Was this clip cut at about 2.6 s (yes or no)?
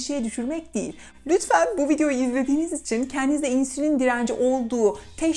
no